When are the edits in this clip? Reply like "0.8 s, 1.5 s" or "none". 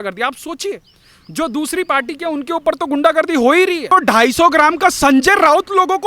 3.9 s